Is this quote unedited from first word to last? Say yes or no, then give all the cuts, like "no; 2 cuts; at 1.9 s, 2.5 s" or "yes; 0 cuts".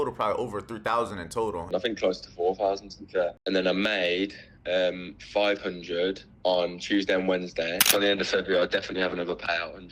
no; 3 cuts; at 1.7 s, 3.4 s, 7.9 s